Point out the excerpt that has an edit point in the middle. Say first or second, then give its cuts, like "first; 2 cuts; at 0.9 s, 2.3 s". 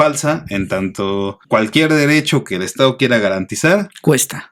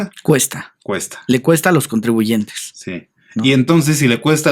first; 1 cut; at 1.4 s